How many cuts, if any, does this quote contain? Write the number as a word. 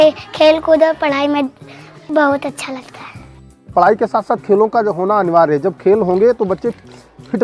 two